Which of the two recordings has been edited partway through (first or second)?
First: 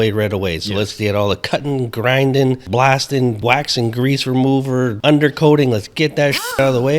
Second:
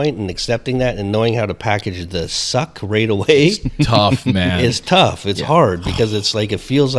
first